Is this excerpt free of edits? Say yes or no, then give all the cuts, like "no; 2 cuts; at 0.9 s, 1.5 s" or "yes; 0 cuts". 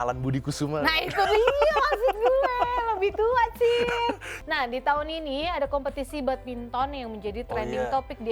no; 1 cut; at 4.3 s